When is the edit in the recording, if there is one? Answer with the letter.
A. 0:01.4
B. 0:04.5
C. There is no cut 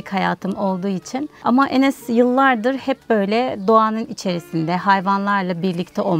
A